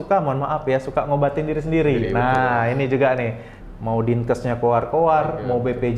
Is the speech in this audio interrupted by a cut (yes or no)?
yes